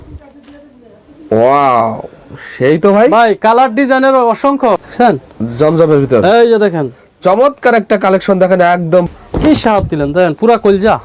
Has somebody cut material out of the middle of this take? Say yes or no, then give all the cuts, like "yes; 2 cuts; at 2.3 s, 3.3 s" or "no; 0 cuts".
yes; 2 cuts; at 4.8 s, 9.1 s